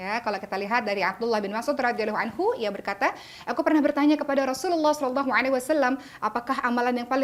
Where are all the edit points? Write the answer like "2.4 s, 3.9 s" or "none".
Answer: none